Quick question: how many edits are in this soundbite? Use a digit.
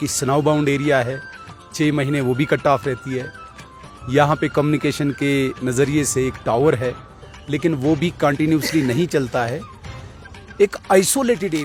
0